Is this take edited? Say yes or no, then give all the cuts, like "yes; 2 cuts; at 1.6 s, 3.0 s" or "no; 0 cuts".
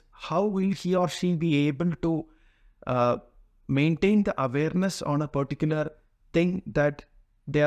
no; 0 cuts